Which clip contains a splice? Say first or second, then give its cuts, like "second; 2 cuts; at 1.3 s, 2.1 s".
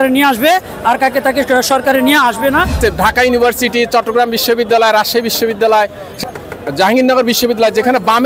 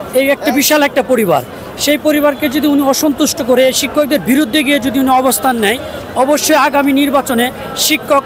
first; 1 cut; at 2.7 s